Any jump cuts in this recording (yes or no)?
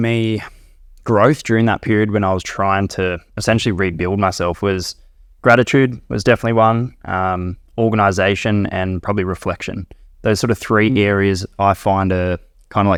no